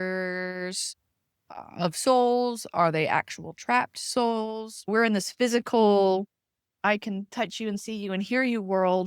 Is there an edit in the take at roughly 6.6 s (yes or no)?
yes